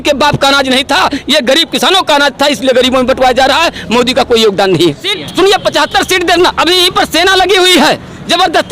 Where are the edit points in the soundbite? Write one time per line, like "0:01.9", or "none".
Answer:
0:05.2